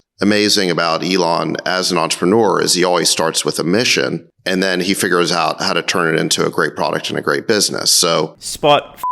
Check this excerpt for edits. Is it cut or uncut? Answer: uncut